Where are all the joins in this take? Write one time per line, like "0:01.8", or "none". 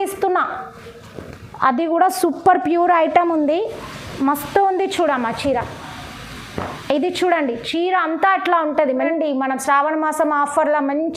0:09.0